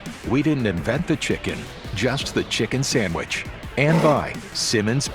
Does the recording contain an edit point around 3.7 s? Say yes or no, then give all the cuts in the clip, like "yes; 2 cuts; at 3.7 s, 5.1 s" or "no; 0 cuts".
yes; 1 cut; at 3.7 s